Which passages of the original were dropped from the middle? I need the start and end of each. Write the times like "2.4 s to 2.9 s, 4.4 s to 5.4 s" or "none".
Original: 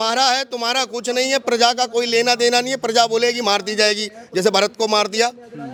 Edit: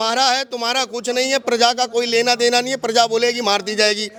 none

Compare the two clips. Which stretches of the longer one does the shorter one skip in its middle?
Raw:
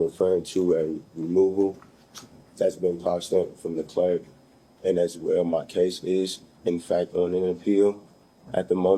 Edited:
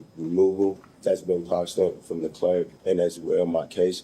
1.9 s to 2.4 s, 4.3 s to 4.7 s

